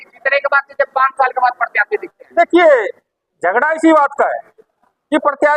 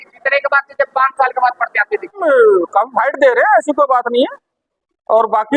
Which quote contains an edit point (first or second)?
second